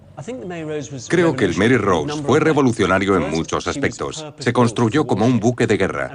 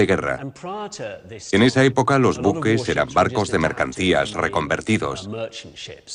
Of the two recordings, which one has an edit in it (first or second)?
first